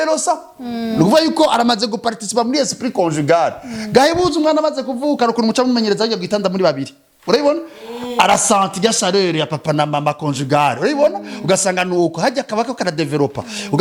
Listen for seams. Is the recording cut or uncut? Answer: uncut